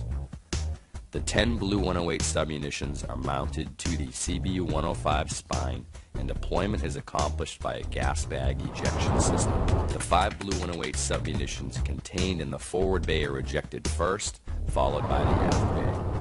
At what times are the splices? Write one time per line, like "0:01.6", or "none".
0:02.2